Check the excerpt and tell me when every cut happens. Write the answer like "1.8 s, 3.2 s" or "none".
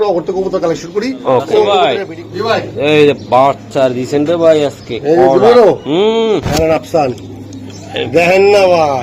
1.8 s